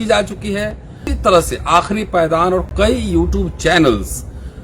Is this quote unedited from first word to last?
no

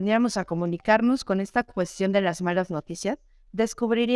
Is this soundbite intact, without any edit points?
yes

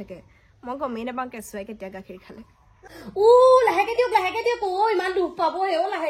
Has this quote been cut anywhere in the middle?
yes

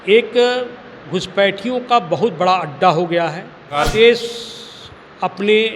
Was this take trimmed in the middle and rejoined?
yes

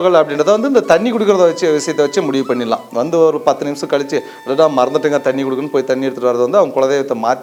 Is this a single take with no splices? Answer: yes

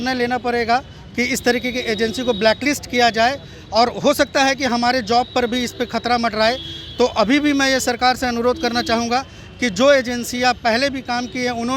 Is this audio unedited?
yes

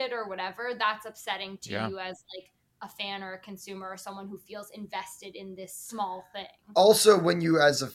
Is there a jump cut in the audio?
no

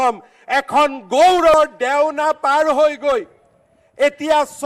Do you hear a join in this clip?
yes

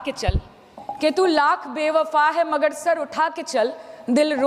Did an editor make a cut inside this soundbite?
no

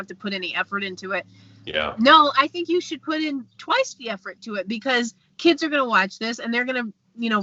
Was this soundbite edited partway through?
no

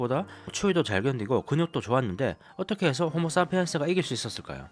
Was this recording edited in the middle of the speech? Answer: no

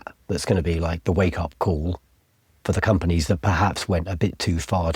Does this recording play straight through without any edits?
yes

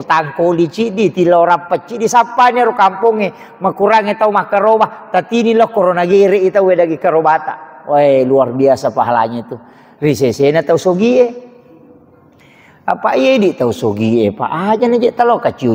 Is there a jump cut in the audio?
no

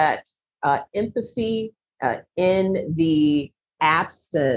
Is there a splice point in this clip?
no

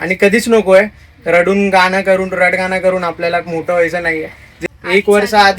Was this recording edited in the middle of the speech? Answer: yes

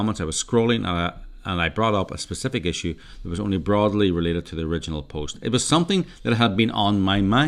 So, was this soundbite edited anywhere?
no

